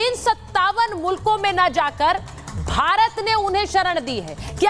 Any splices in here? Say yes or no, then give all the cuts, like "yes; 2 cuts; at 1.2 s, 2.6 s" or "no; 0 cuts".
no; 0 cuts